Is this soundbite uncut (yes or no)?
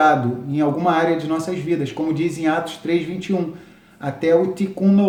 yes